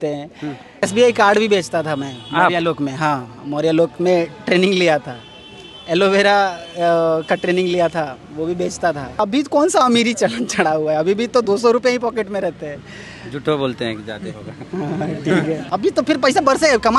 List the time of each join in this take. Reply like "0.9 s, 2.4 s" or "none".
0.8 s, 9.2 s, 15.6 s